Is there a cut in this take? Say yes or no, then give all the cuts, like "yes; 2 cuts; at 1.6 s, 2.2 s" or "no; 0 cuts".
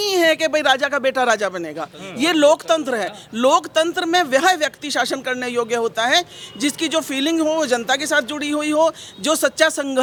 no; 0 cuts